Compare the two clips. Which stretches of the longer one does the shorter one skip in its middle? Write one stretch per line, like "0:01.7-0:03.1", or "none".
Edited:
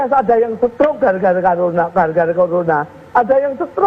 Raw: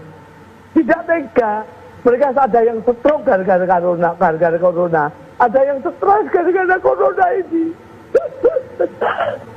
none